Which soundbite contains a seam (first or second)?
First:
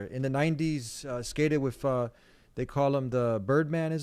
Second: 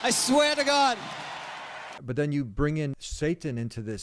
second